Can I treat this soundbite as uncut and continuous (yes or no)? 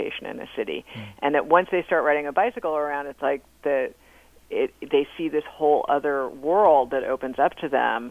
yes